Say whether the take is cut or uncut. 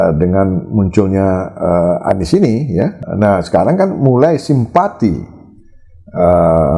cut